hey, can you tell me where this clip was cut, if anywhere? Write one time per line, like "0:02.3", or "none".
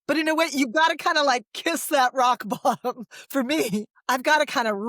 0:03.9